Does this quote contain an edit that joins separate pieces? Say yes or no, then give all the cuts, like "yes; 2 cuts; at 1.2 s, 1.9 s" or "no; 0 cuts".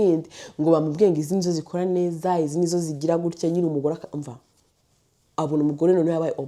no; 0 cuts